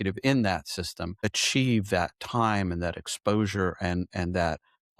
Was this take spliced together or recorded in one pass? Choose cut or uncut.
cut